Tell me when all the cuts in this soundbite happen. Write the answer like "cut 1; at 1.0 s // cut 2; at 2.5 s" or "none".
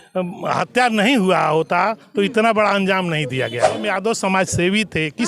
cut 1; at 3.8 s